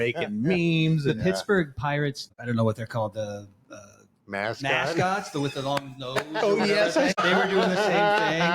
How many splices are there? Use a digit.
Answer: 2